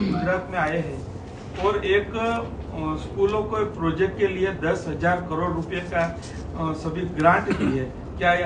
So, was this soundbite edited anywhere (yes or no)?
no